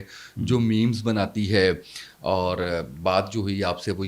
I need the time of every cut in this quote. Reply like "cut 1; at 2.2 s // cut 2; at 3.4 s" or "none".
none